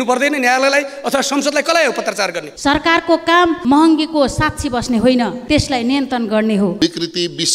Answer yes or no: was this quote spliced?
yes